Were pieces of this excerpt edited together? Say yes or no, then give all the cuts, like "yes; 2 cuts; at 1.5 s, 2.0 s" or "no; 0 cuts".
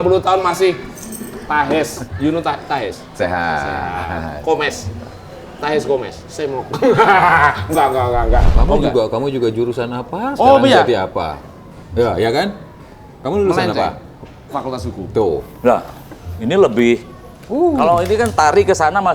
yes; 3 cuts; at 2.0 s, 6.2 s, 8.5 s